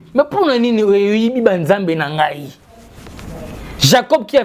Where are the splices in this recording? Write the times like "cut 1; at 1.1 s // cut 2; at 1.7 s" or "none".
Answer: none